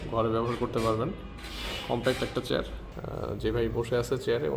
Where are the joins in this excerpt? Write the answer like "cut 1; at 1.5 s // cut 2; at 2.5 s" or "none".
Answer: cut 1; at 2.8 s